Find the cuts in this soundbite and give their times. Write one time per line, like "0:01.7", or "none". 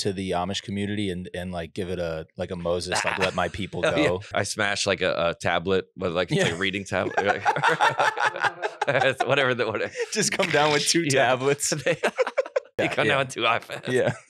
0:04.3
0:12.7